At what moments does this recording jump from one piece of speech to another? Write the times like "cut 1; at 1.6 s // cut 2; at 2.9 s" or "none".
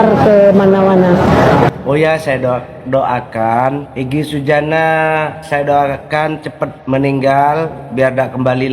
cut 1; at 1.7 s // cut 2; at 3.9 s // cut 3; at 5.4 s // cut 4; at 6.8 s

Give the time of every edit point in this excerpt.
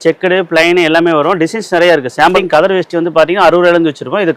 cut 1; at 2.3 s

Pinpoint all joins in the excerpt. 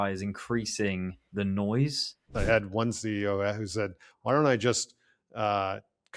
cut 1; at 2.3 s

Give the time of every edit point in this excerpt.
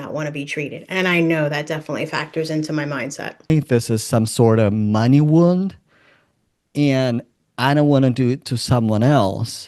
cut 1; at 3.5 s

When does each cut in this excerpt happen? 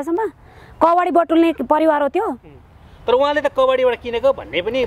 none

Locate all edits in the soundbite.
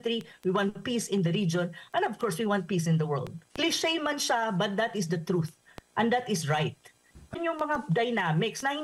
cut 1; at 7.3 s

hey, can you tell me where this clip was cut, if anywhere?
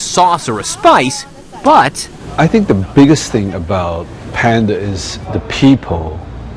none

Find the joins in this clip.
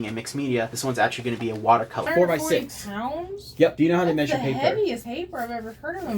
cut 1; at 2.1 s

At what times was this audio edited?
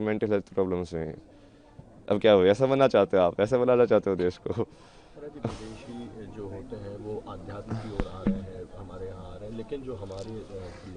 none

